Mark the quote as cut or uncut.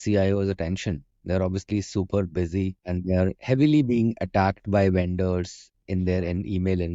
uncut